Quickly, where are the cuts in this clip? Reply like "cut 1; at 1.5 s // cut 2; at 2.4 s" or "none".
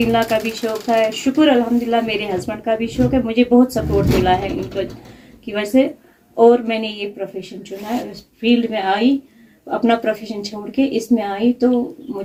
none